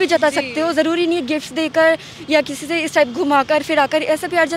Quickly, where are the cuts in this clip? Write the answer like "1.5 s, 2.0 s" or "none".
none